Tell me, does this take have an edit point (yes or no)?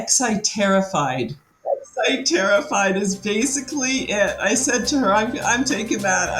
yes